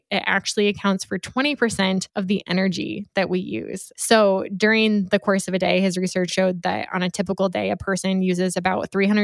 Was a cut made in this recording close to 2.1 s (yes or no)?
no